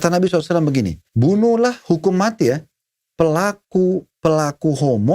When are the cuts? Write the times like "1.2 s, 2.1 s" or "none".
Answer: 1.0 s